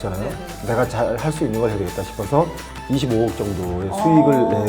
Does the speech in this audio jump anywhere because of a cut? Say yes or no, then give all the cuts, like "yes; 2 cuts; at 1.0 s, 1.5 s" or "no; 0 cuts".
yes; 1 cut; at 2.7 s